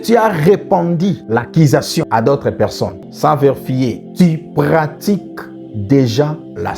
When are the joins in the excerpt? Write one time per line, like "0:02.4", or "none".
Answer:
0:03.1